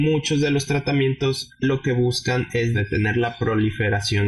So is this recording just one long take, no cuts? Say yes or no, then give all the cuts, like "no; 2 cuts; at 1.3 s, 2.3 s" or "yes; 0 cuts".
no; 1 cut; at 2.8 s